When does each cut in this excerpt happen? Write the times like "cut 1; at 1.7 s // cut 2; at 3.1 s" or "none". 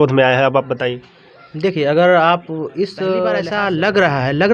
cut 1; at 3.5 s